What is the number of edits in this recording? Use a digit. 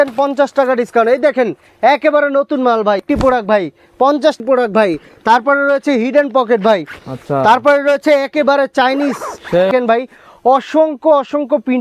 3